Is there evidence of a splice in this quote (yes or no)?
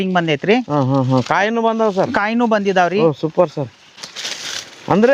no